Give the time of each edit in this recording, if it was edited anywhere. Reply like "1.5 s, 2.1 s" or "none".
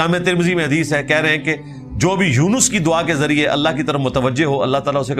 none